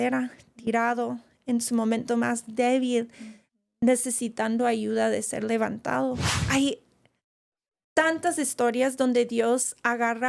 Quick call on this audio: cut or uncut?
cut